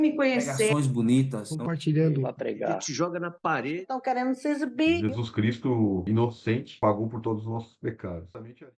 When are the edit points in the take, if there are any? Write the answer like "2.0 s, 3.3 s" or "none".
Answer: none